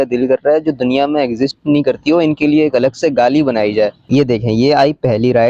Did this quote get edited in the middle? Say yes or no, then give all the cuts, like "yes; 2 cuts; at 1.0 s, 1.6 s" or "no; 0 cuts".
yes; 1 cut; at 4.0 s